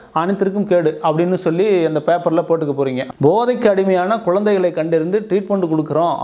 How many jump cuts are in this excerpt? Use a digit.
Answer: 1